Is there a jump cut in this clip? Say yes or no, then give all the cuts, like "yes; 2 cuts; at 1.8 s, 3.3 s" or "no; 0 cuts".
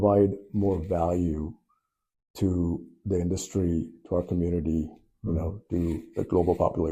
no; 0 cuts